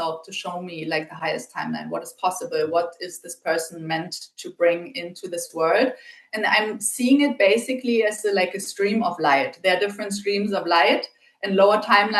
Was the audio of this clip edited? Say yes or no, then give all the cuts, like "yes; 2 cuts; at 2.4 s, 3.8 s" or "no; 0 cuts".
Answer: no; 0 cuts